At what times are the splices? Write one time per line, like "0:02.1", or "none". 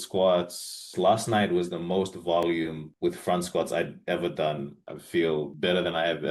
0:00.8
0:04.8

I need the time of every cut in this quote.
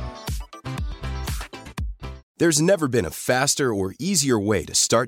0:02.2

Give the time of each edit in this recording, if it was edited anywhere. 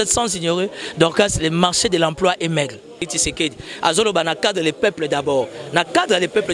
0:03.1

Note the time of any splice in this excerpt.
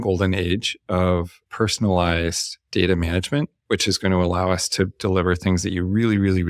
0:01.4

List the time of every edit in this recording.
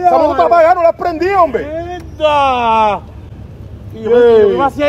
none

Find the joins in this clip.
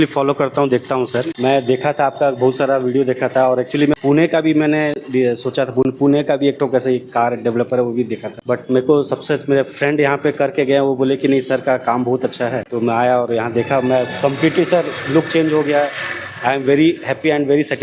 0:01.3
0:04.0
0:08.3
0:12.7

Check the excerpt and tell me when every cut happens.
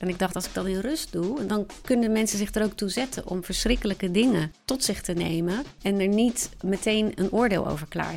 0:01.5
0:04.6
0:05.7
0:06.5

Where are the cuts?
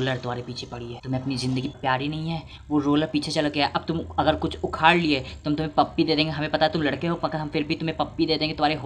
0:01.0
0:01.7

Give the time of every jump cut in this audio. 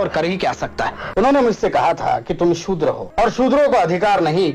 0:01.0
0:03.1

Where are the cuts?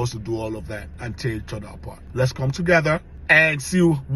0:00.9
0:02.0

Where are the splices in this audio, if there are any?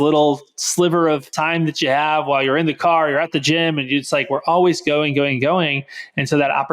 0:01.3

